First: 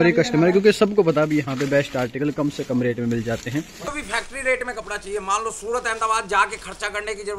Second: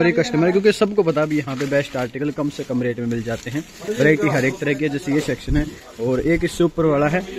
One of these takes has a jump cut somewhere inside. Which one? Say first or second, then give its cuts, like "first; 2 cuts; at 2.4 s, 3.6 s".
first; 1 cut; at 3.8 s